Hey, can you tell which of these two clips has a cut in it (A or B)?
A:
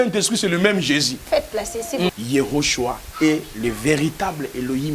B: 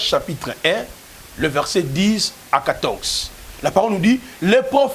A